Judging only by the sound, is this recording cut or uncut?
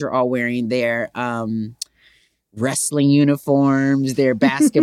uncut